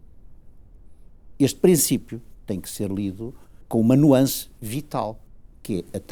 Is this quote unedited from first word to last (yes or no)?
no